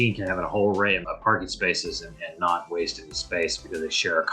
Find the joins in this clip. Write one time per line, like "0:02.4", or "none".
none

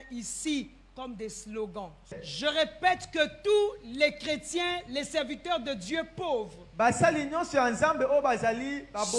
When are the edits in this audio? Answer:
0:02.1

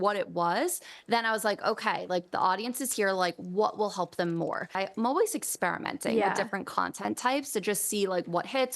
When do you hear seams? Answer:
0:04.8

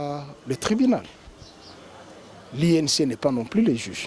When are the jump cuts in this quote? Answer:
none

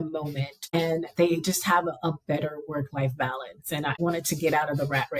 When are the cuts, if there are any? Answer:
0:00.7
0:04.0

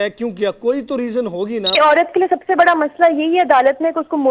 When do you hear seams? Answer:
0:01.8

